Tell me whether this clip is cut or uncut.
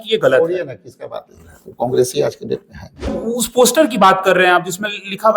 cut